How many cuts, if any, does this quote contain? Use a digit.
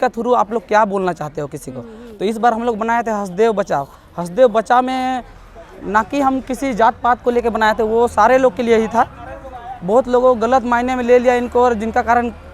0